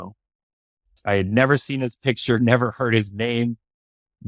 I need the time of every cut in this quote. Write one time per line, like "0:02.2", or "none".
0:01.0